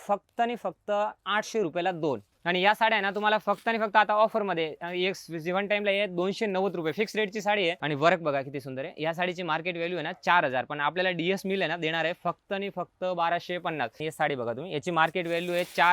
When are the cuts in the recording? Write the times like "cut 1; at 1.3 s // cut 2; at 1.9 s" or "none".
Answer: cut 1; at 2.3 s // cut 2; at 7.8 s // cut 3; at 14.0 s

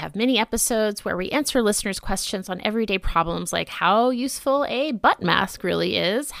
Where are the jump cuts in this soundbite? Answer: none

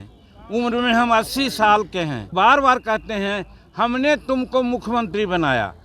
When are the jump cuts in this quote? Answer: cut 1; at 2.3 s

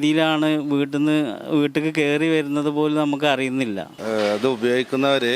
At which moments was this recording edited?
cut 1; at 3.9 s

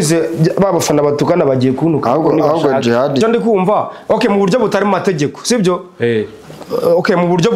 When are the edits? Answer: cut 1; at 3.2 s

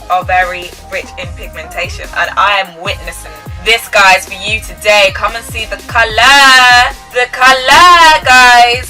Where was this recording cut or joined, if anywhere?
none

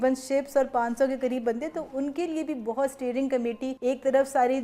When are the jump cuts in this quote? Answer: cut 1; at 3.7 s

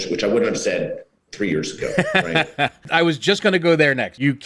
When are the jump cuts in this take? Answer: cut 1; at 2.9 s

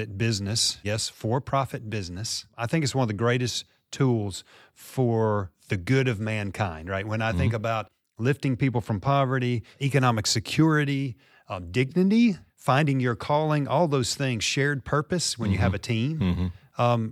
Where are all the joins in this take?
cut 1; at 0.8 s // cut 2; at 2.5 s // cut 3; at 9.8 s // cut 4; at 12.5 s

